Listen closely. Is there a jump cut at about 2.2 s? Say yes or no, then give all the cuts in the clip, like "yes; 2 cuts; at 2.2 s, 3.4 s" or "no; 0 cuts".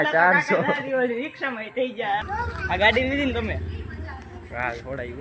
yes; 1 cut; at 2.2 s